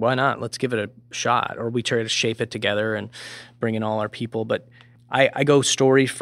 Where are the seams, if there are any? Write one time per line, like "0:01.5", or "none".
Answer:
none